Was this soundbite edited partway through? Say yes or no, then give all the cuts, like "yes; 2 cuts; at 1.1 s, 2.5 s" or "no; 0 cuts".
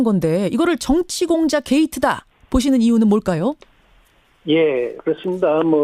no; 0 cuts